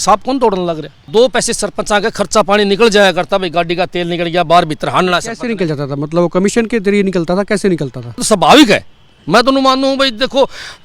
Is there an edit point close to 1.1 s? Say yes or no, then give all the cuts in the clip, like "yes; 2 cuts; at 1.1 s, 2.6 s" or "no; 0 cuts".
yes; 2 cuts; at 1.1 s, 8.2 s